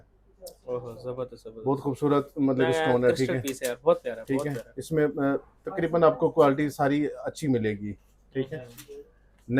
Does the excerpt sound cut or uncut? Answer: uncut